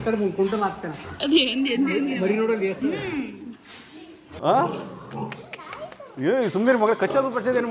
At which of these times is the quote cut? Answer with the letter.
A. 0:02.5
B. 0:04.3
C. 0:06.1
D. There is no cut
B